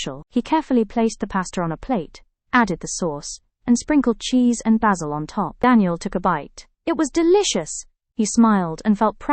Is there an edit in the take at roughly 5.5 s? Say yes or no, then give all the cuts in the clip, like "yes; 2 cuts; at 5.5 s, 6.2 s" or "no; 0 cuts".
yes; 1 cut; at 5.5 s